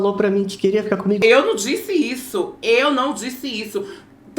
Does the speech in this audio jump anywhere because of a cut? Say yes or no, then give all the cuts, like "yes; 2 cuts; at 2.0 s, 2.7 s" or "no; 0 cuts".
yes; 1 cut; at 1.2 s